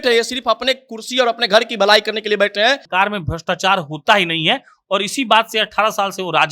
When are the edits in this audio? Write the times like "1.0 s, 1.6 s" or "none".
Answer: 2.9 s